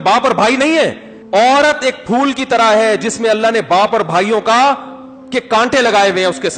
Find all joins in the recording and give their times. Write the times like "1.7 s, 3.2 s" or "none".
1.1 s